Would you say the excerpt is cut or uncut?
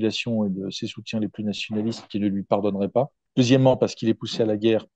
cut